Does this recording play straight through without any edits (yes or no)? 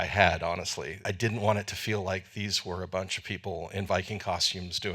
no